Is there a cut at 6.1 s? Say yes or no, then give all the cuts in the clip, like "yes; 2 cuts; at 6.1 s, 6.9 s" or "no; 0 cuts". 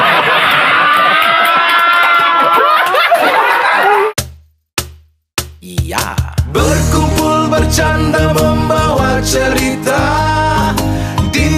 no; 1 cut; at 4.2 s